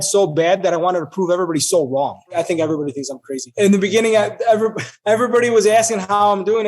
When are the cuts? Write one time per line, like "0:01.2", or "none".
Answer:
0:02.3
0:03.4
0:04.9